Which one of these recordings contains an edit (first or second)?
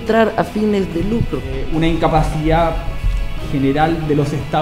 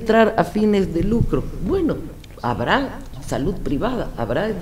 first